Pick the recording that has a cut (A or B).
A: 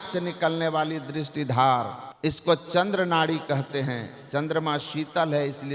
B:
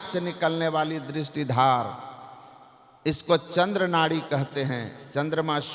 A